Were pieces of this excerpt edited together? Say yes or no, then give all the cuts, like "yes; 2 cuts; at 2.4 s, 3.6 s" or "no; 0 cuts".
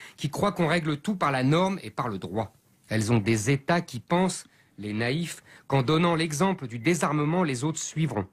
yes; 1 cut; at 3.9 s